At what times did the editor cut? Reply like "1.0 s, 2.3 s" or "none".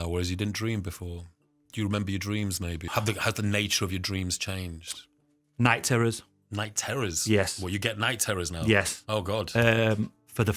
2.8 s